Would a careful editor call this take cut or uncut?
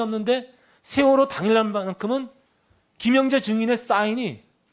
cut